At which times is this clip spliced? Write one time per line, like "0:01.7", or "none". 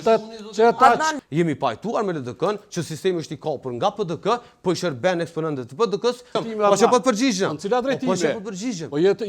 0:01.1
0:06.4